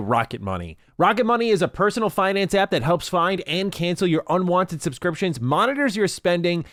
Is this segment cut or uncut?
uncut